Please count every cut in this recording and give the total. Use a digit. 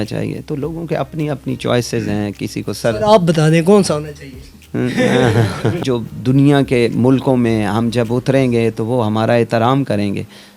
1